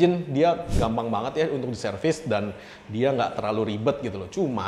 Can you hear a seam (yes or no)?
no